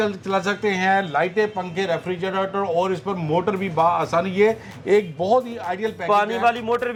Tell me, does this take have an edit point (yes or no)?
no